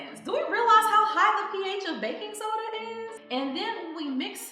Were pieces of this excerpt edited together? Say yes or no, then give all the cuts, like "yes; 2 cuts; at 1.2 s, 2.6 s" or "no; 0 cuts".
yes; 1 cut; at 3.2 s